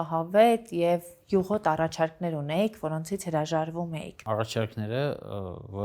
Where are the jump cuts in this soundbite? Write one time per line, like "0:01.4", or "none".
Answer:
0:04.1

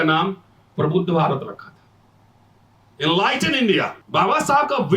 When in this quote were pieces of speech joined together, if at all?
0:04.0

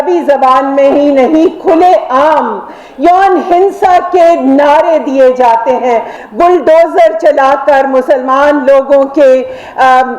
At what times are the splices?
0:06.1

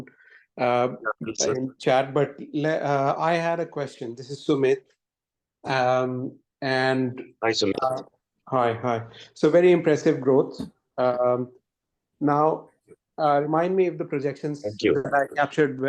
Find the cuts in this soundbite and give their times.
none

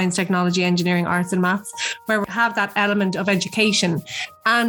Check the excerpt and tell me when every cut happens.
0:02.2

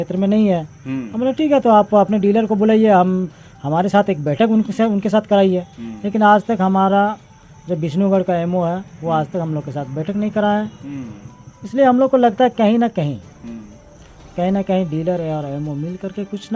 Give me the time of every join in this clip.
none

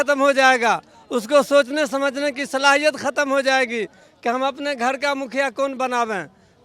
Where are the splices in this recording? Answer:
none

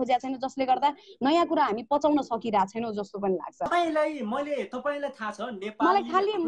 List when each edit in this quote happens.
0:03.7

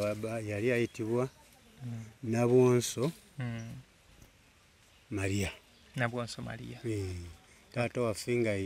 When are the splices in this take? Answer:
none

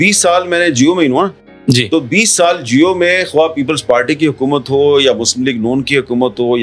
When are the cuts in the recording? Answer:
none

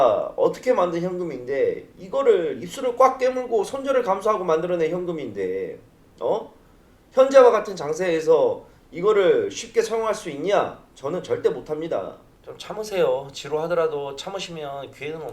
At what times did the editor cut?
0:12.2

